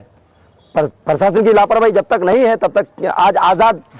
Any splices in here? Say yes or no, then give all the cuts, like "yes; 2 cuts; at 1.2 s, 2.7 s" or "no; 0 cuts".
no; 0 cuts